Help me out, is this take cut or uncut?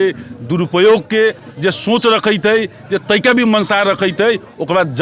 uncut